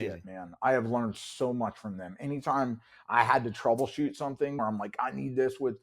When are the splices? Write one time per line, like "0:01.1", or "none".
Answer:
0:04.6